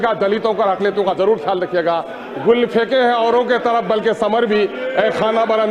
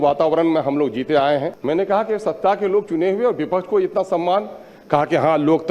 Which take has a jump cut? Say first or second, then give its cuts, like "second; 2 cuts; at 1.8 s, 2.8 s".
second; 1 cut; at 1.5 s